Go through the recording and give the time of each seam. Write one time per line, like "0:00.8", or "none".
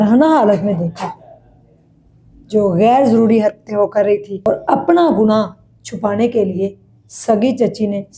0:04.5

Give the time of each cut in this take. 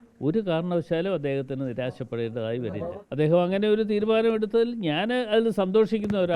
0:03.0

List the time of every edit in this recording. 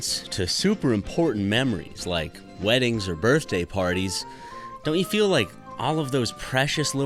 none

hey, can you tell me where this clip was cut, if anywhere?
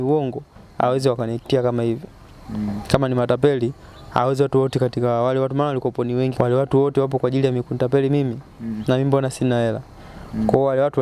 0:06.3

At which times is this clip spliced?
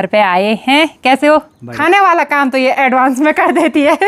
0:01.6

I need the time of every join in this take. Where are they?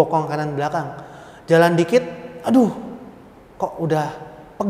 none

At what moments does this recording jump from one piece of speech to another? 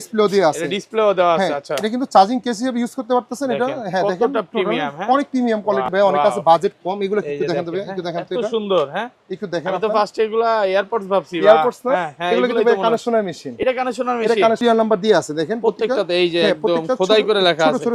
0:05.9
0:14.6

